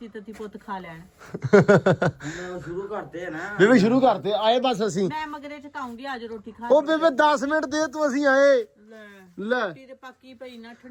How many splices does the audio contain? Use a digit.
0